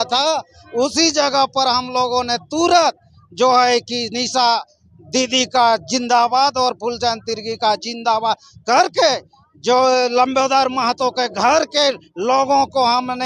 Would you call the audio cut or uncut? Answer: uncut